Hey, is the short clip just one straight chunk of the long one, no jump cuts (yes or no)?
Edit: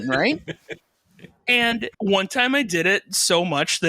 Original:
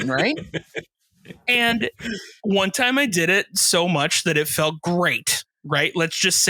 no